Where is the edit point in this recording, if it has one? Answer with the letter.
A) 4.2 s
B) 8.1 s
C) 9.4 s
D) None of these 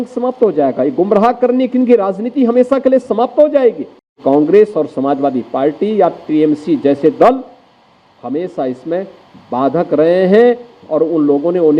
A